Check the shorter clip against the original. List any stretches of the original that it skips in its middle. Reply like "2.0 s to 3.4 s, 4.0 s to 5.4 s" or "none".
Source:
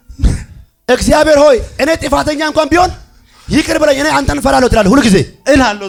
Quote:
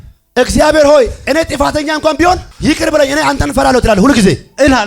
3.0 s to 3.4 s